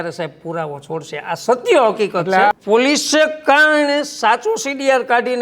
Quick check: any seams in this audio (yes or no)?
yes